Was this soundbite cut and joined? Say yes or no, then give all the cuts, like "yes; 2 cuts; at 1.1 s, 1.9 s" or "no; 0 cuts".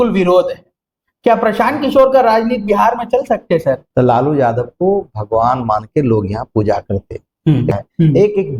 yes; 2 cuts; at 3.9 s, 7.7 s